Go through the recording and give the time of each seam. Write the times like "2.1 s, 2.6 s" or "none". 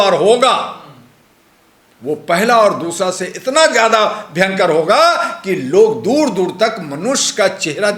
none